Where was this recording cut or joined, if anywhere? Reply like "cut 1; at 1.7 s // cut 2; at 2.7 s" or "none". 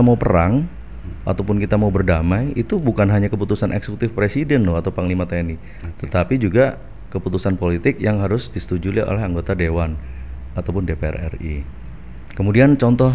none